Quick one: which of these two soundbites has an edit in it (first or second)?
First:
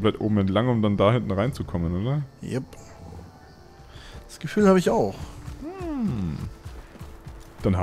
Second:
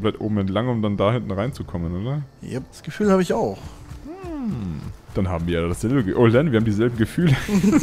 second